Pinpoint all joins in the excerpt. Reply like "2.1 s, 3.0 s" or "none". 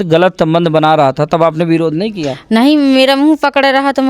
none